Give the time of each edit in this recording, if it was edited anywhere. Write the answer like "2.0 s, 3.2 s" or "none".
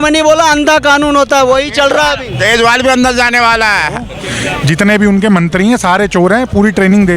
4.2 s